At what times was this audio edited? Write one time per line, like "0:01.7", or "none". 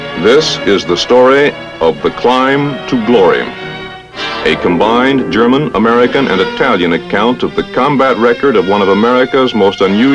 none